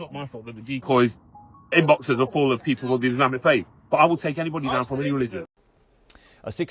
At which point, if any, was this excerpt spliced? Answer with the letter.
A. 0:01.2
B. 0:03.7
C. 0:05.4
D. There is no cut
D